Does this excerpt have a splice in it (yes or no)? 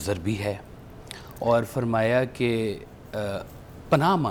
no